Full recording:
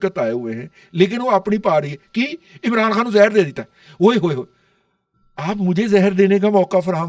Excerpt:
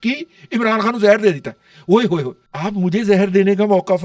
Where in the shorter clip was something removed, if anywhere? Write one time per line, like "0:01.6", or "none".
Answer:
0:02.4